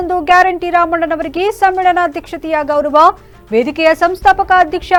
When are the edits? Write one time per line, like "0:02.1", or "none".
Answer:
none